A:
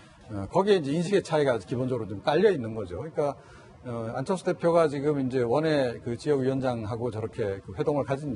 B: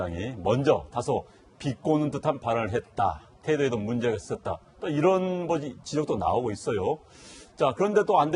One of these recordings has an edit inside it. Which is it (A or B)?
A